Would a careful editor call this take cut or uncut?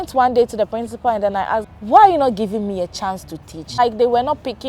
cut